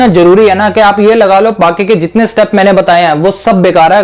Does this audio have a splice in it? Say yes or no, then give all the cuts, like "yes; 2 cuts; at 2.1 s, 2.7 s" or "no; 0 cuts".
no; 0 cuts